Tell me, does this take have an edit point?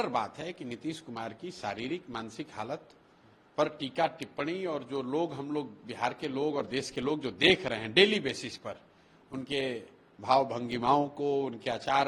no; 0 cuts

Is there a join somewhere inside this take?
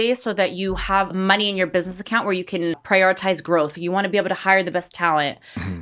yes; 2 cuts; at 1.1 s, 2.8 s

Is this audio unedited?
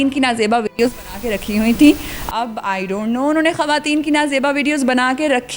yes; 0 cuts

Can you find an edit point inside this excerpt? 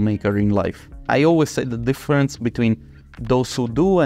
yes; 1 cut; at 1.1 s

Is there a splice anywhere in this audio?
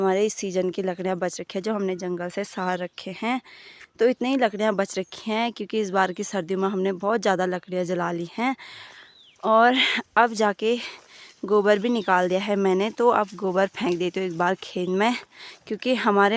no; 0 cuts

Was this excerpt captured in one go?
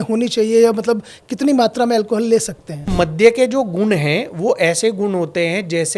no; 1 cut; at 2.9 s

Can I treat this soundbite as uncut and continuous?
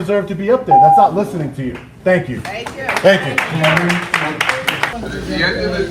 yes; 0 cuts

